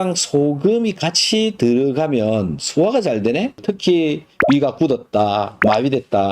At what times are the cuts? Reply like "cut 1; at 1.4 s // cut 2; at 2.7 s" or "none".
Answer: cut 1; at 3.6 s